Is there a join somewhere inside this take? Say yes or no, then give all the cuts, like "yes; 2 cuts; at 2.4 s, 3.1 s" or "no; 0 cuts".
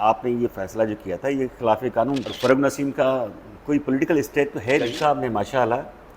yes; 2 cuts; at 2.3 s, 4.9 s